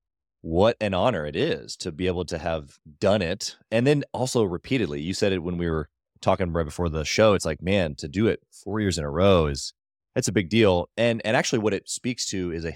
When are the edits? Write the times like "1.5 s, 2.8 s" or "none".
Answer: none